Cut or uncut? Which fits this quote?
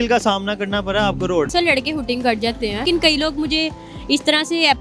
cut